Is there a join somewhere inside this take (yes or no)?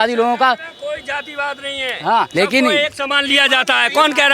yes